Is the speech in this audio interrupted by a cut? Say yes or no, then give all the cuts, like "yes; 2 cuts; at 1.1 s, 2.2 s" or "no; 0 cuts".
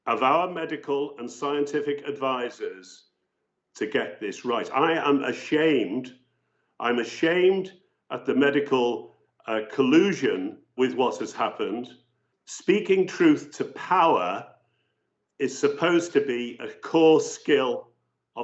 yes; 1 cut; at 10.7 s